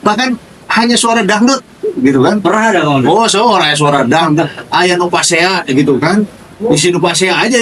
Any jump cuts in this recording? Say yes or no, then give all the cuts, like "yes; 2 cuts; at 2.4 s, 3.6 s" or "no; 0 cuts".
no; 0 cuts